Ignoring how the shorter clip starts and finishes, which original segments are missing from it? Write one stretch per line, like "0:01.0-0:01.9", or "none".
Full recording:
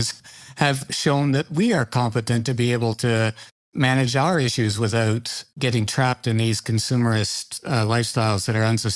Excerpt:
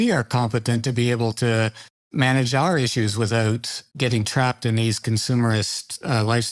none